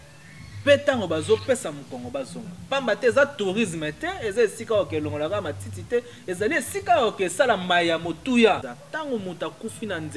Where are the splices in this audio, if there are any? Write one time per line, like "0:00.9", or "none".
0:08.7